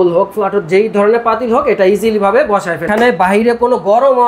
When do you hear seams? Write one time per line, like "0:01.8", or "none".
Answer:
0:02.9